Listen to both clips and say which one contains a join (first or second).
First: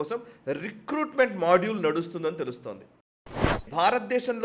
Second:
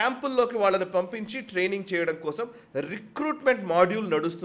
first